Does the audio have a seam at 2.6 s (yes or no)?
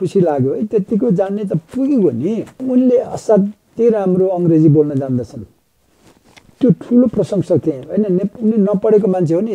yes